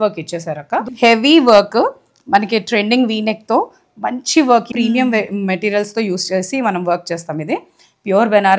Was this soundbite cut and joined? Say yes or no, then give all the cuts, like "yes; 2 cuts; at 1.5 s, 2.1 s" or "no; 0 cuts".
yes; 2 cuts; at 0.9 s, 4.7 s